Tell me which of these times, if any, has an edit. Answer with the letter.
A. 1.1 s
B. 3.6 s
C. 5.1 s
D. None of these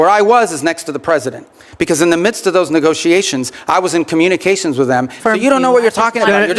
C